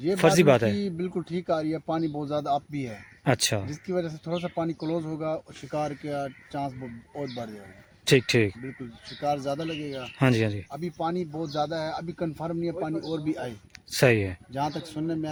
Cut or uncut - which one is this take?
uncut